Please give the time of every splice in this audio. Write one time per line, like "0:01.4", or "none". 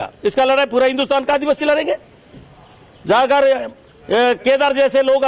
none